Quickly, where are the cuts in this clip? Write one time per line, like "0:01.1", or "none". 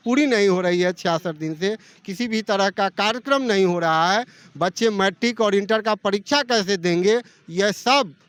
none